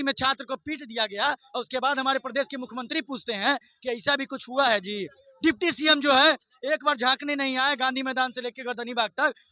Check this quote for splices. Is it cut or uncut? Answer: uncut